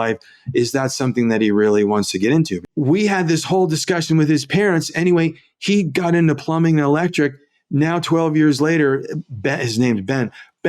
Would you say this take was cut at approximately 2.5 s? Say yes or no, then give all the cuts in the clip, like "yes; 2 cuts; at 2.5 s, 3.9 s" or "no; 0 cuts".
yes; 1 cut; at 2.5 s